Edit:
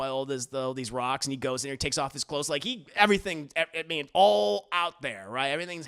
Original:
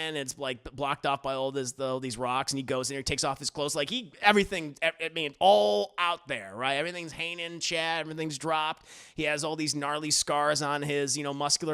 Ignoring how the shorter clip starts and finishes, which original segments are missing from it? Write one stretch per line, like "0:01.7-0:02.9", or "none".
none